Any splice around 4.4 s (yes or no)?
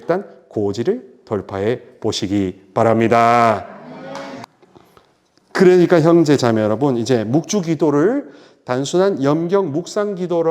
yes